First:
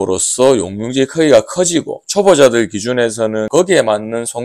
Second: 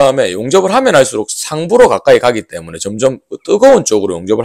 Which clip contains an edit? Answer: first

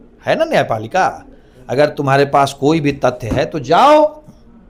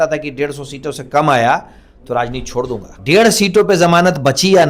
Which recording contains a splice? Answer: second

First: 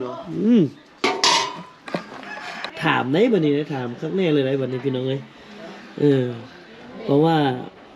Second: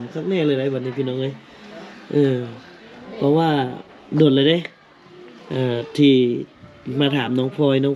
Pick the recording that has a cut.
first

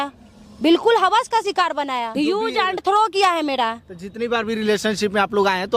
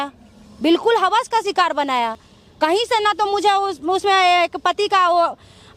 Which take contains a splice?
first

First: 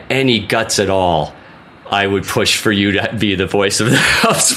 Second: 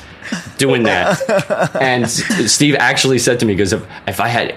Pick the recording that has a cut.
second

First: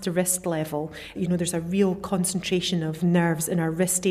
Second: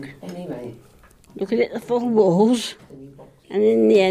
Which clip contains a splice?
first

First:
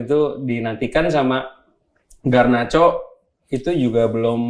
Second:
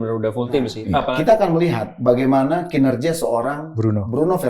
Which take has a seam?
second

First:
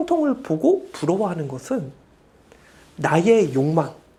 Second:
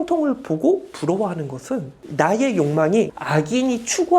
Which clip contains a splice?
second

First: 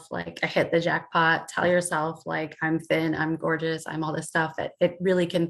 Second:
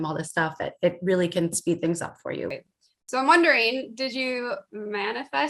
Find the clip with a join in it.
second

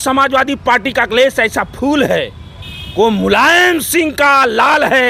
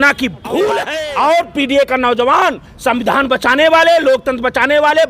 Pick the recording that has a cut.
second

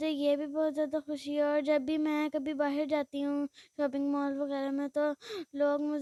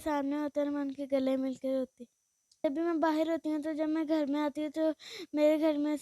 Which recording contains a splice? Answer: second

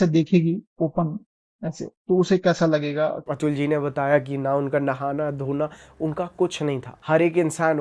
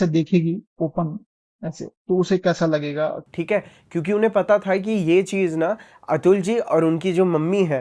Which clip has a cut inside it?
first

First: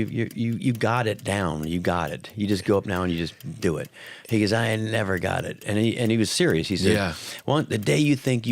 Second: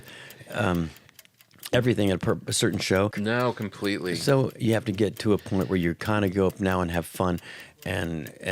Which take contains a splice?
second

